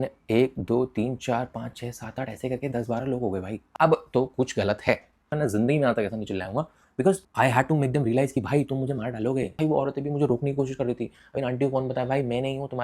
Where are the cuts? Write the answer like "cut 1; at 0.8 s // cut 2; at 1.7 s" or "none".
cut 1; at 3.6 s // cut 2; at 5.3 s // cut 3; at 9.5 s